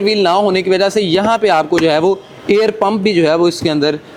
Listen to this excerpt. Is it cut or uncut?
uncut